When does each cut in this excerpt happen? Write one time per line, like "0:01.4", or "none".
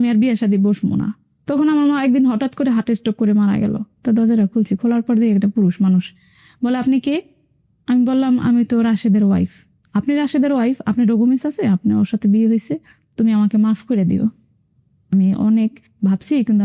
0:01.3
0:03.8
0:13.0